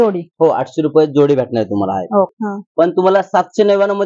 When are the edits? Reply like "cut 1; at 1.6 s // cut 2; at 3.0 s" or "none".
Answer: cut 1; at 2.4 s